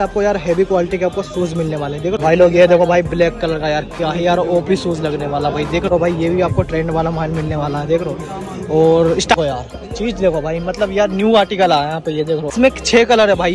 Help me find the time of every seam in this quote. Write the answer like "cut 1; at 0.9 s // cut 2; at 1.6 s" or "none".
cut 1; at 2.2 s // cut 2; at 5.9 s // cut 3; at 9.4 s // cut 4; at 12.5 s